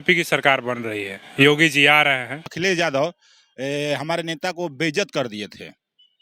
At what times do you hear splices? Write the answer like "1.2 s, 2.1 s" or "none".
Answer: 2.5 s

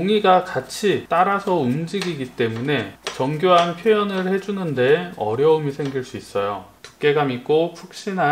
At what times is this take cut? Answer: 1.0 s, 3.0 s, 6.8 s

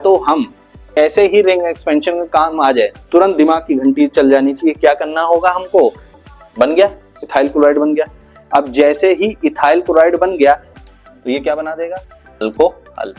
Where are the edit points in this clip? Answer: 1.0 s, 6.1 s, 10.7 s

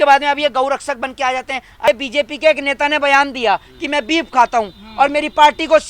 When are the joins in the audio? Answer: 1.9 s

